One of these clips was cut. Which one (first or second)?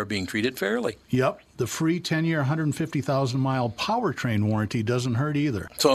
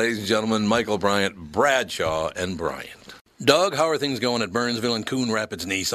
second